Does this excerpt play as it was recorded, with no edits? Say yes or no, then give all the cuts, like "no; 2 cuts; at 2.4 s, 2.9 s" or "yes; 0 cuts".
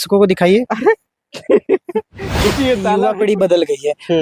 no; 1 cut; at 2.9 s